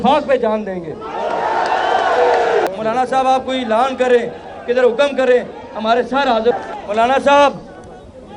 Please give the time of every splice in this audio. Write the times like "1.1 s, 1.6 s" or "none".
2.7 s, 6.7 s